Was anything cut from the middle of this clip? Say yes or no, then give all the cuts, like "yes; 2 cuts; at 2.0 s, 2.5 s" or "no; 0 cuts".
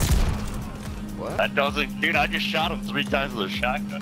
yes; 1 cut; at 1.4 s